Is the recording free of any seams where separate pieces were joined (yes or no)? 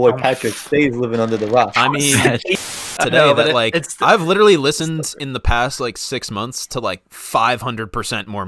no